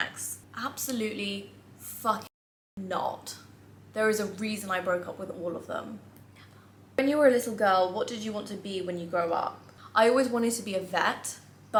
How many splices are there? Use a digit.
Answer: 0